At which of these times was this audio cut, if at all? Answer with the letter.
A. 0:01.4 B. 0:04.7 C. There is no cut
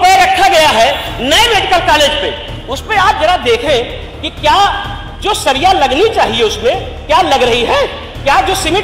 C